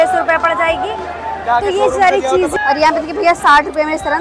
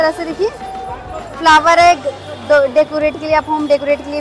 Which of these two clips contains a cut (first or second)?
first